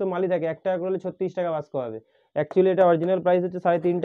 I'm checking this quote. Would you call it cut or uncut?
uncut